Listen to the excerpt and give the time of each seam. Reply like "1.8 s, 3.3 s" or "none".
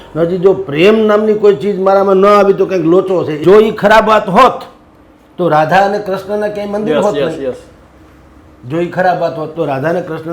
3.3 s